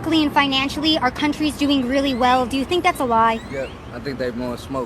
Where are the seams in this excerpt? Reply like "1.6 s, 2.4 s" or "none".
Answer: 1.8 s